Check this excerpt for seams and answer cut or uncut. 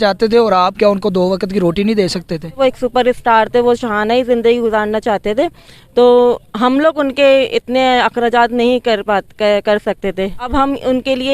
cut